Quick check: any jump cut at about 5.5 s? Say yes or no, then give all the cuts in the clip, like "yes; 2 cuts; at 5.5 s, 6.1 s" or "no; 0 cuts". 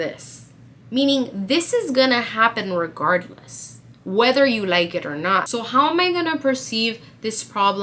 yes; 1 cut; at 5.5 s